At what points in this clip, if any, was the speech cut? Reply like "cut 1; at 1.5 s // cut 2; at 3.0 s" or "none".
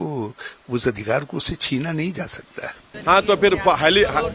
cut 1; at 2.8 s